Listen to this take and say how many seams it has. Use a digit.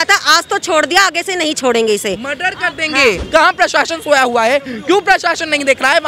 1